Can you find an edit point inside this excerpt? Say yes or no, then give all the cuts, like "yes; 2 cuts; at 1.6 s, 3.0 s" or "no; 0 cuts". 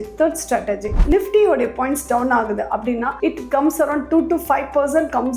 yes; 1 cut; at 1.0 s